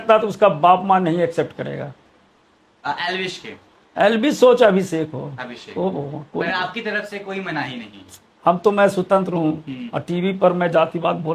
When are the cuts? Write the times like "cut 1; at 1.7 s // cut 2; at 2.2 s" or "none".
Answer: none